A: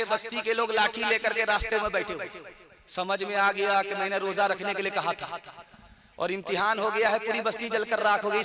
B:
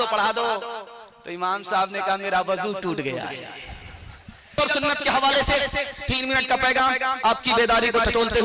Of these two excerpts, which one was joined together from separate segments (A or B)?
B